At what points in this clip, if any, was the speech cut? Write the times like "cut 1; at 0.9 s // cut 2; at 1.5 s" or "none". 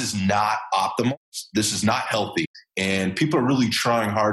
cut 1; at 1.1 s // cut 2; at 2.6 s